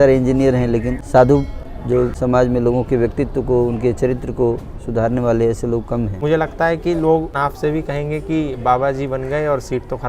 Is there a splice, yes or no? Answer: yes